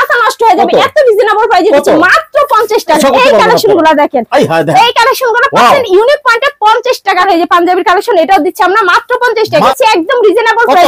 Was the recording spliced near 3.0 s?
yes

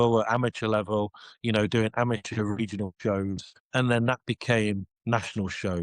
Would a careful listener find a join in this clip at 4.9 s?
yes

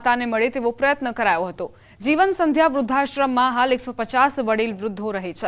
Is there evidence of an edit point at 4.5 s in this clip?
yes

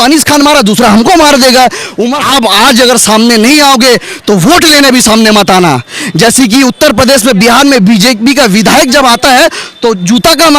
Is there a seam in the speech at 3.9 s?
no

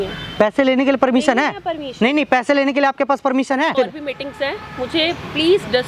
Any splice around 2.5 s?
no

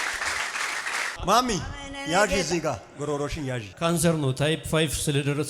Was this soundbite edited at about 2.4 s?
no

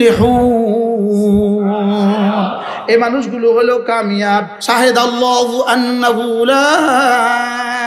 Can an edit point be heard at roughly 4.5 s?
yes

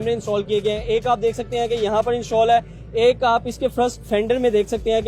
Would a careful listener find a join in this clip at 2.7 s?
no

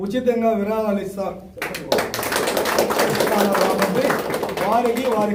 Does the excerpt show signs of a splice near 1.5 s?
no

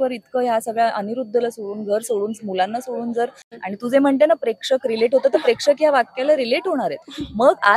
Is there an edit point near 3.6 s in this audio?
yes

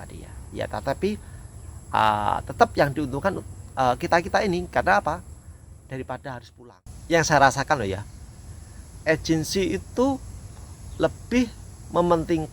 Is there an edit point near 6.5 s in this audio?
yes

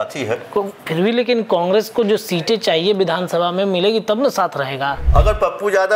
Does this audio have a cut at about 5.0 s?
yes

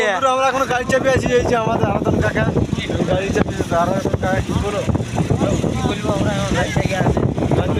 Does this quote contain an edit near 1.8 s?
no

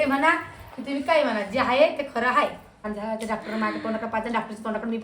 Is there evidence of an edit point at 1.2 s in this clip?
no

